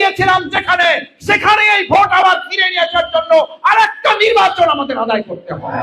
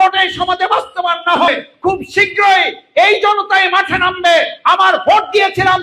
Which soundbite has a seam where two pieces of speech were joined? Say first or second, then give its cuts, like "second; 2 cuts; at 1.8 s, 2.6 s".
second; 1 cut; at 1.5 s